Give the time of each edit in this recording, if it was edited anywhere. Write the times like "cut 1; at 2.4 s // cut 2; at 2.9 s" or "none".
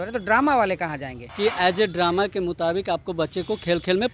cut 1; at 1.2 s